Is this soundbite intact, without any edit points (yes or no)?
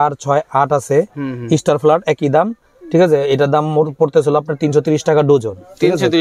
yes